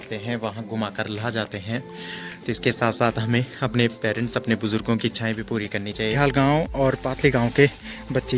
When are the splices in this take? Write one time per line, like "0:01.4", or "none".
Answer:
0:06.1